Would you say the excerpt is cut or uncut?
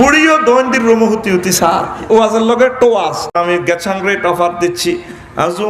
cut